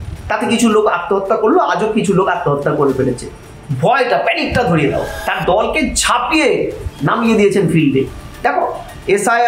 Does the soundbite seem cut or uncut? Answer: cut